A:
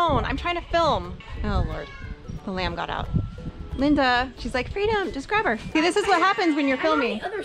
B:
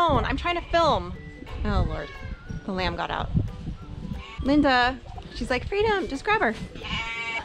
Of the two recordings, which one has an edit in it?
A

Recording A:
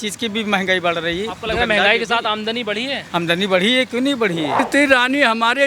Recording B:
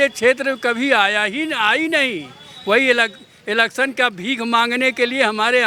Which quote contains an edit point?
A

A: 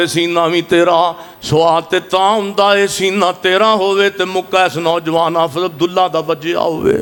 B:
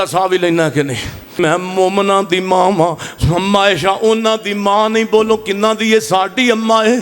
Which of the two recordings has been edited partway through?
B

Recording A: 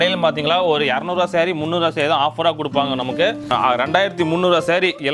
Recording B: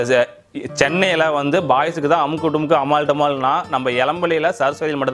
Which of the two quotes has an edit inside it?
A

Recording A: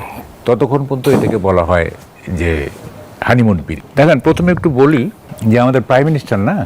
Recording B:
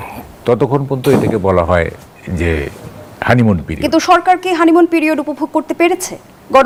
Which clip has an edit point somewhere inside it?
A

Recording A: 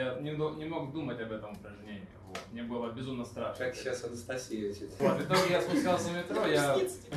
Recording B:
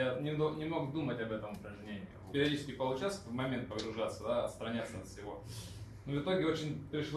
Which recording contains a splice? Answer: B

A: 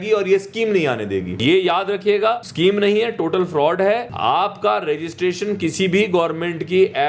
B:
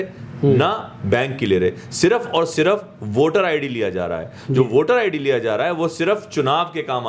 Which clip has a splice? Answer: A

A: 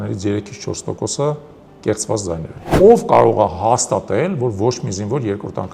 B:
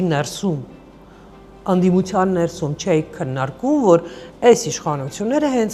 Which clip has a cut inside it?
A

